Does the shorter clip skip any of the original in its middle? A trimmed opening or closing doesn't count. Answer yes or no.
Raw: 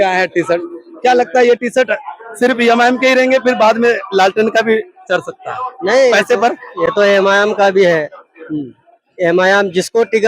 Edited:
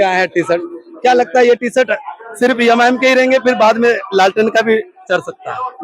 no